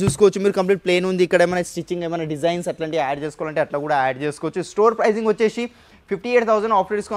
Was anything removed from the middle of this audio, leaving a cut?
no; 0 cuts

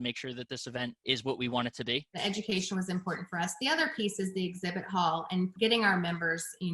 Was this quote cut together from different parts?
yes; 3 cuts; at 1.0 s, 2.2 s, 5.5 s

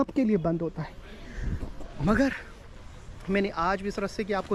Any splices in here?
no; 0 cuts

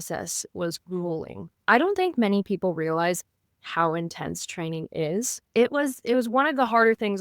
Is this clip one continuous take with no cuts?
no; 1 cut; at 5.5 s

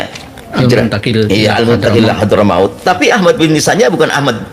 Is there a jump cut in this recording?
no; 0 cuts

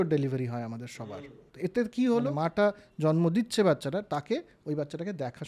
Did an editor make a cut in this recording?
yes; 2 cuts; at 1.4 s, 2.3 s

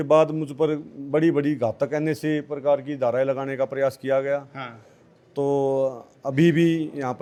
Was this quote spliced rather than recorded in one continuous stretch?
no; 0 cuts

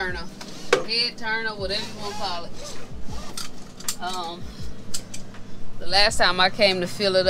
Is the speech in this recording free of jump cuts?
yes; 0 cuts

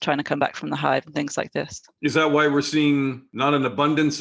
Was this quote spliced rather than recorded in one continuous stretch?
yes; 2 cuts; at 1.8 s, 3.2 s

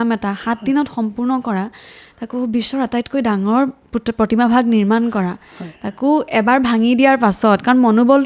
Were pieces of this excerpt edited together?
no; 0 cuts

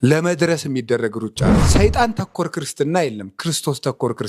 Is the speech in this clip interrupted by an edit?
yes; 1 cut; at 1.6 s

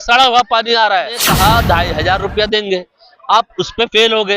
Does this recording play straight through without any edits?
no; 1 cut; at 1.2 s

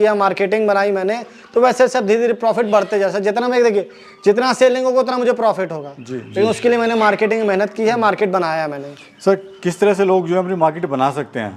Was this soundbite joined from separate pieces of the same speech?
no; 0 cuts

